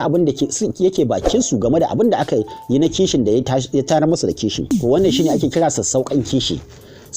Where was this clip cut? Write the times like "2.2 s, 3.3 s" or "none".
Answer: 4.7 s

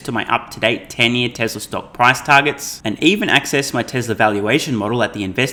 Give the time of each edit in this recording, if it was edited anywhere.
none

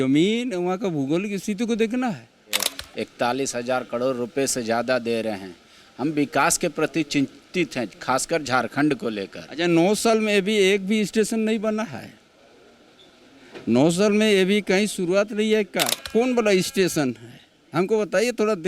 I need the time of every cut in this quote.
2.7 s, 16.0 s

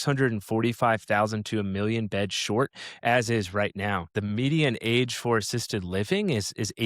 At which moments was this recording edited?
4.1 s

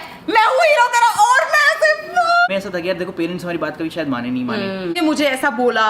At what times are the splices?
2.5 s, 4.9 s

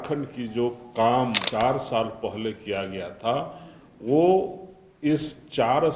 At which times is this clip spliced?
1.5 s

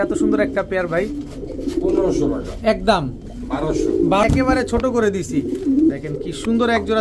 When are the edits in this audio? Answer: 4.2 s

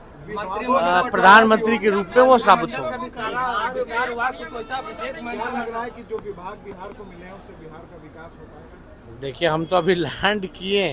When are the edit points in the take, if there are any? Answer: none

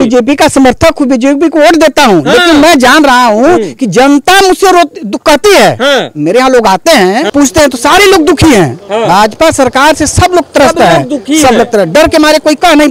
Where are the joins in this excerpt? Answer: 7.3 s

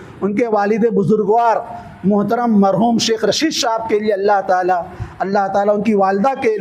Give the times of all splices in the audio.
none

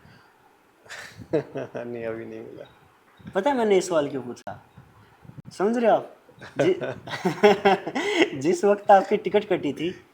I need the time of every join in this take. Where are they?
none

